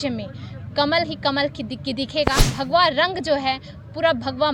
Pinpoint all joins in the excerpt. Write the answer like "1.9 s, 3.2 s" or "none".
2.5 s